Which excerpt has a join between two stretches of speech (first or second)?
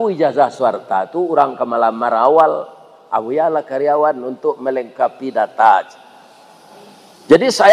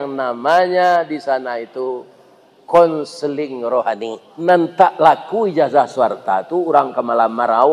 second